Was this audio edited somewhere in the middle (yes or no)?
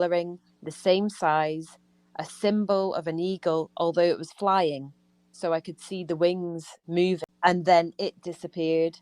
yes